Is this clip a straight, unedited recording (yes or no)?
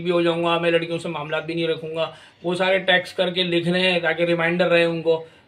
yes